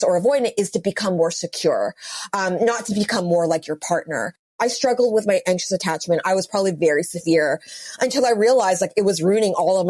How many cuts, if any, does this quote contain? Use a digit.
1